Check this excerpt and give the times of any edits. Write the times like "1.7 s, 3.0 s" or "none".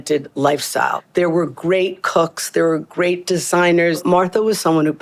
1.0 s, 4.0 s